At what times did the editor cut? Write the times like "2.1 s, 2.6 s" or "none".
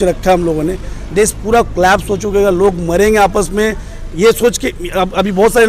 none

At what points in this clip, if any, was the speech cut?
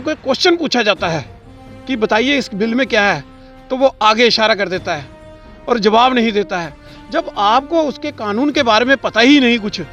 none

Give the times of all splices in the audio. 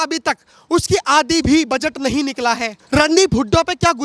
2.7 s

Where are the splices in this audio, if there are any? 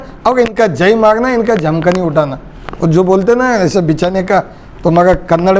none

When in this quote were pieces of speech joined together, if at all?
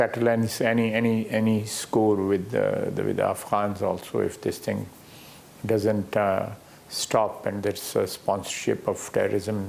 none

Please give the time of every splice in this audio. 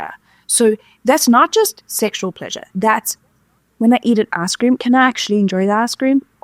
none

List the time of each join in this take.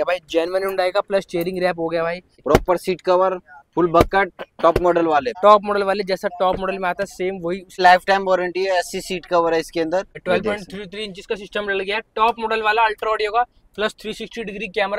2.4 s, 5.3 s, 7.8 s, 10.1 s

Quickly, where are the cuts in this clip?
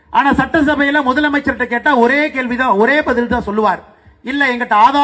none

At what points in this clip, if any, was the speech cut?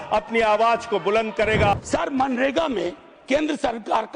1.7 s

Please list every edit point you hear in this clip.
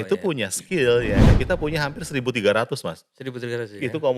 1.3 s

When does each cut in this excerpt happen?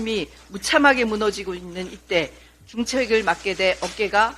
none

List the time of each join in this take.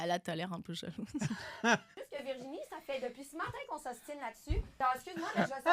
1.9 s, 4.7 s

